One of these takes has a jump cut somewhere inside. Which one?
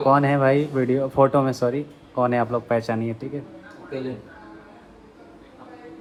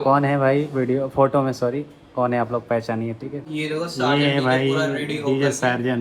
second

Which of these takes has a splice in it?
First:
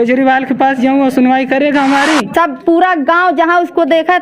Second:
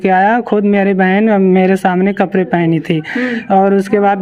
first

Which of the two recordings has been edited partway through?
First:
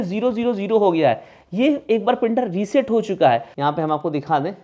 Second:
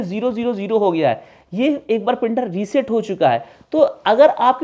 first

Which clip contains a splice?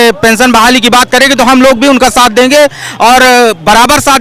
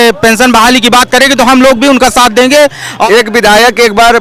second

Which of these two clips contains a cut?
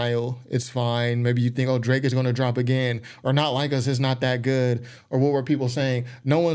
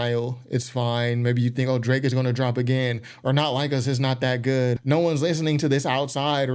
second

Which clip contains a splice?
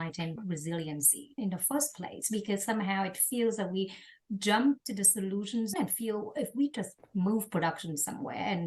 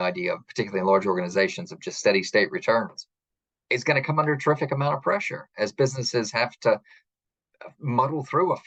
first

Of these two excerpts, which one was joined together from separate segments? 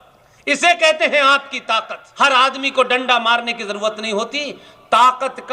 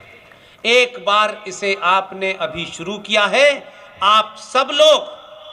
first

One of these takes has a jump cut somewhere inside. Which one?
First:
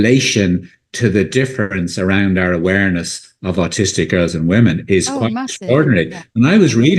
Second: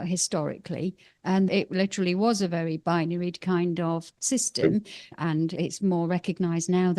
second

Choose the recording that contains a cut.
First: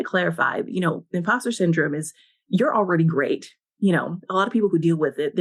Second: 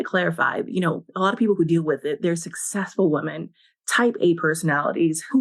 second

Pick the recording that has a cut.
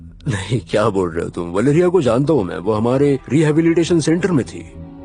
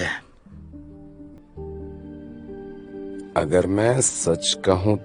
second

